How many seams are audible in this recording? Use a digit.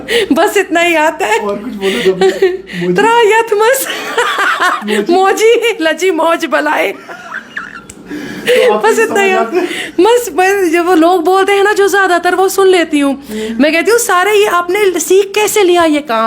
0